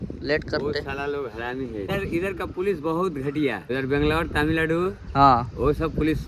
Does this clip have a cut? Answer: yes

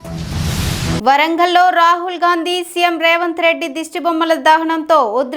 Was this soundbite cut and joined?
no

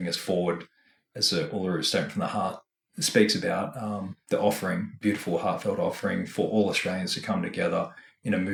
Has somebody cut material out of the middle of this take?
no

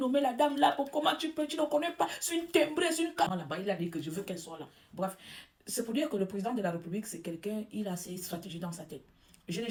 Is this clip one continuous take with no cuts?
yes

